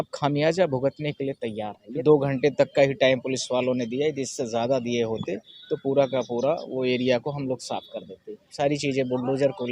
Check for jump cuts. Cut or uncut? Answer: cut